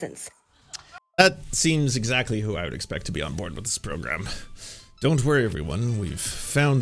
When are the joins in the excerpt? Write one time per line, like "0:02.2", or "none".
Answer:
0:01.0